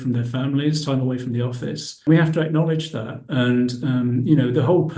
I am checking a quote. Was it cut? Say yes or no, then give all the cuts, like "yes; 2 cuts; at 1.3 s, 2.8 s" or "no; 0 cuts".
yes; 1 cut; at 2.1 s